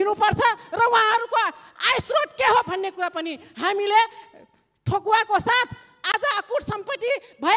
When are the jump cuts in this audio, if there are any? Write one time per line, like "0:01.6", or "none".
0:05.9